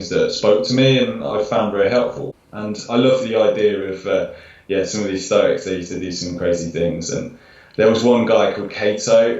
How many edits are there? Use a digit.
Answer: 1